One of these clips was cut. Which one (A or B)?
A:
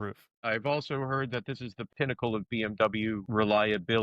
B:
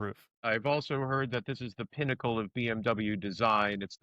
A